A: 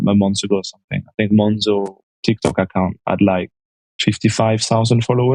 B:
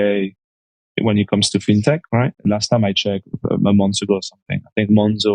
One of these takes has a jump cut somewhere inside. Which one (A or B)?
B